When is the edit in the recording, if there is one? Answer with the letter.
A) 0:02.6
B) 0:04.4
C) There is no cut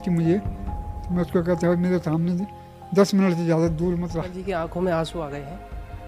B